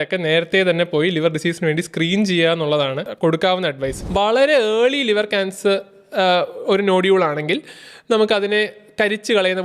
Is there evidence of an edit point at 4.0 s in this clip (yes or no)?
yes